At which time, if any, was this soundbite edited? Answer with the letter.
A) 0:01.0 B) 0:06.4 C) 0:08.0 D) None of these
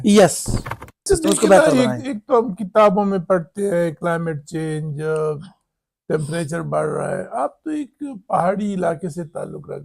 A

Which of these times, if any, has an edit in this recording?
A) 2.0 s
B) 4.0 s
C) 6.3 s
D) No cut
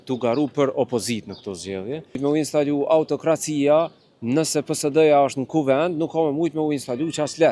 A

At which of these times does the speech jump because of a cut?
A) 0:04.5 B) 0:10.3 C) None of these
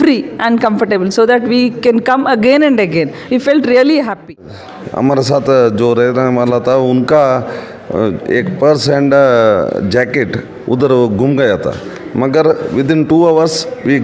A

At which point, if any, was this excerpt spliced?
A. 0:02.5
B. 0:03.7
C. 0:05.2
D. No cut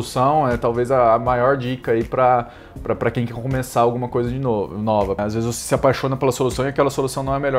C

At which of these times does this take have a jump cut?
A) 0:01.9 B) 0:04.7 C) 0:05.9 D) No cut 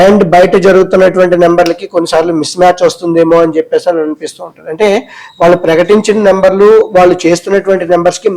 D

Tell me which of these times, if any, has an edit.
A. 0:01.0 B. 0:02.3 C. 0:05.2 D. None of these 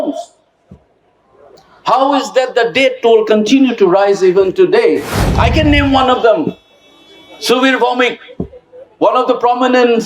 C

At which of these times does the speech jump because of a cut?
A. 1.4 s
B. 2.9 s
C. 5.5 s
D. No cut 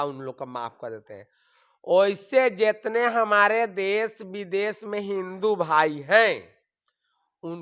D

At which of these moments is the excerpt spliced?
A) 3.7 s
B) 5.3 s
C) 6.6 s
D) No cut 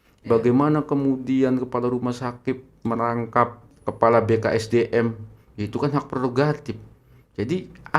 A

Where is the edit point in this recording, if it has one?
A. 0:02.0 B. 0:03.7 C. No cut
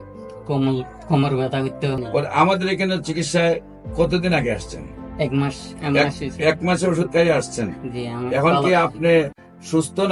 A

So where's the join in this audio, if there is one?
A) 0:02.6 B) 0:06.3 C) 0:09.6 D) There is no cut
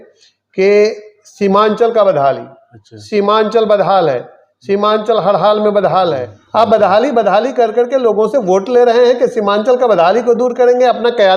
B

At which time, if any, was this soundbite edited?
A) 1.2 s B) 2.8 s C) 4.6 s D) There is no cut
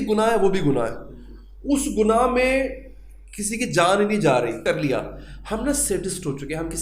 C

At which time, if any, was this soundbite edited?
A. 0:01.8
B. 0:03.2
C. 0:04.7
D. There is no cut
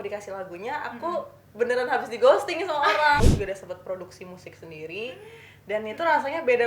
B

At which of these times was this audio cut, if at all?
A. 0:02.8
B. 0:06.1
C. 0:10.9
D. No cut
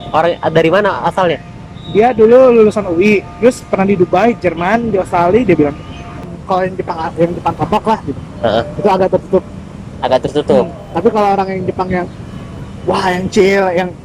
B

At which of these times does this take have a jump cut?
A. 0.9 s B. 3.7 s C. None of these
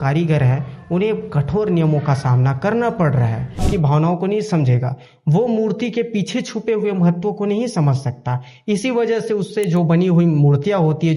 B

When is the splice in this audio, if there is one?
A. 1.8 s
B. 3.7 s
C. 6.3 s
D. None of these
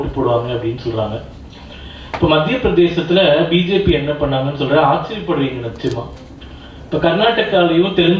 D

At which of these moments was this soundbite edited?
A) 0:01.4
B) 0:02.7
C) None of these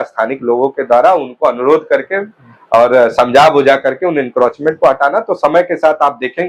C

